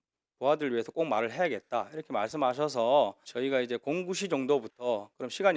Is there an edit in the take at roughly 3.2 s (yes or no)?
yes